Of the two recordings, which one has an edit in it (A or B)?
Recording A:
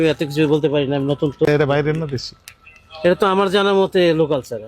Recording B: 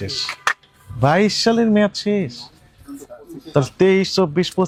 A